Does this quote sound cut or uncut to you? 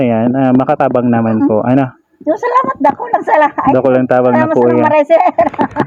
uncut